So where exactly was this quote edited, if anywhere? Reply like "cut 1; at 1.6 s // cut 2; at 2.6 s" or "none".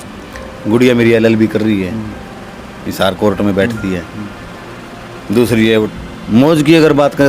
cut 1; at 5.9 s

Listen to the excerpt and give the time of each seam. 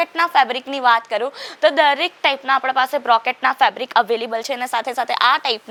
none

